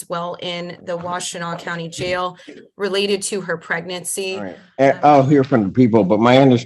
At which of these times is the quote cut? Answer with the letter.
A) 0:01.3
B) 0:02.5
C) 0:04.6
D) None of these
C